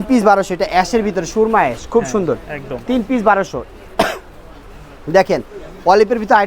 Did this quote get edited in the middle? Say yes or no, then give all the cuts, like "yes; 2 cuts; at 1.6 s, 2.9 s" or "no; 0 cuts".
no; 0 cuts